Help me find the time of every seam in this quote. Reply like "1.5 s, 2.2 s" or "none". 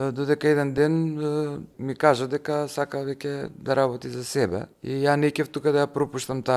1.8 s